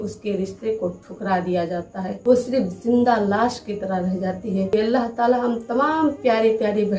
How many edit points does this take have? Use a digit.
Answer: 2